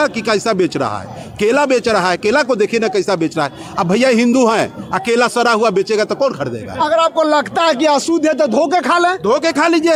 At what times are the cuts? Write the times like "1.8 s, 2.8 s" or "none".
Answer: none